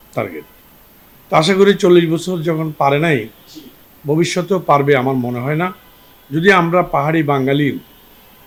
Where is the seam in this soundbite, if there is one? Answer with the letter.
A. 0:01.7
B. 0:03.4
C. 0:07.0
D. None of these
D